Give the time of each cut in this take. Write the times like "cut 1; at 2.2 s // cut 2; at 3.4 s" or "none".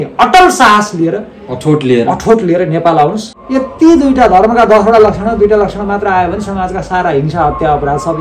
cut 1; at 3.3 s